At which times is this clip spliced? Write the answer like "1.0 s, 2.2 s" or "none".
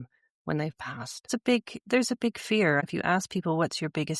1.3 s, 2.8 s